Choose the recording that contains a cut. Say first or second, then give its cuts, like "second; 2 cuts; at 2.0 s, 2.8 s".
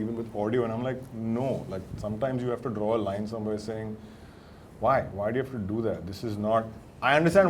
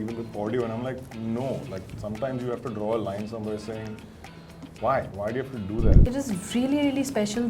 second; 1 cut; at 6.0 s